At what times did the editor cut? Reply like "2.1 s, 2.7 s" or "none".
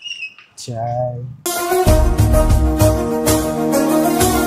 1.0 s